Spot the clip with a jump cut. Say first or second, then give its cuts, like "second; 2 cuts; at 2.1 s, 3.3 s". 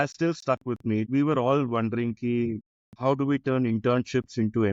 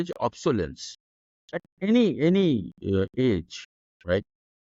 first; 2 cuts; at 1.1 s, 2.7 s